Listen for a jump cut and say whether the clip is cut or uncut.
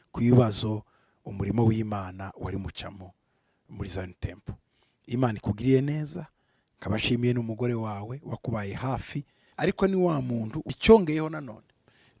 cut